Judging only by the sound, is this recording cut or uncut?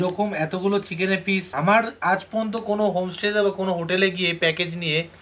uncut